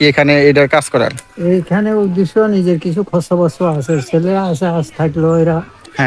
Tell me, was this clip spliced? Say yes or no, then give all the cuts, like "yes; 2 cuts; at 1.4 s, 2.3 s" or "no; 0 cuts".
no; 0 cuts